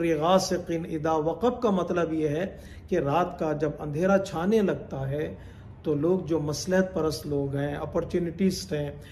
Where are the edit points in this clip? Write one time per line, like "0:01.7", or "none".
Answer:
none